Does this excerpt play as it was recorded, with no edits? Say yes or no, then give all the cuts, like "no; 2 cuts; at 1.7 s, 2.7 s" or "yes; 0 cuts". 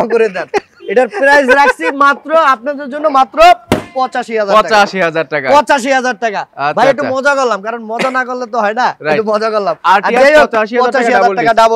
yes; 0 cuts